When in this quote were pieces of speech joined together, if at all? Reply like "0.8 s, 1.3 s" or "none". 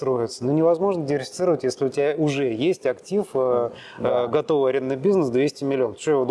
none

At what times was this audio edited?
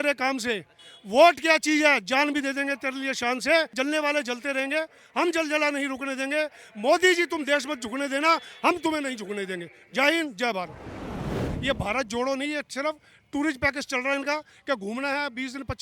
3.7 s, 11.4 s

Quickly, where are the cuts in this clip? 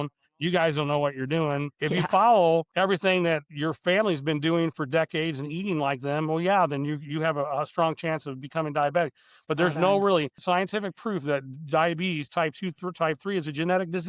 1.7 s, 2.7 s, 3.5 s, 10.4 s

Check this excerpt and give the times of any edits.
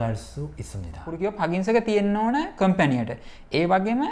1.1 s

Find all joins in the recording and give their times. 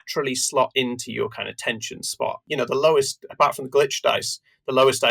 2.4 s

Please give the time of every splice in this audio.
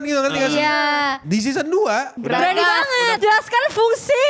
1.2 s, 2.1 s, 3.2 s

